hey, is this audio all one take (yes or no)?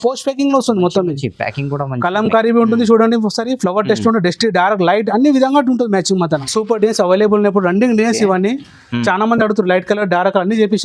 no